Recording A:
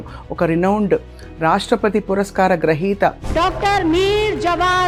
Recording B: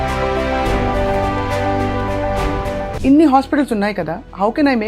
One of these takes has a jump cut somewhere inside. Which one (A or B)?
B